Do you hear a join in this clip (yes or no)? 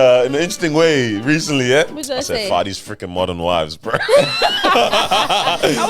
no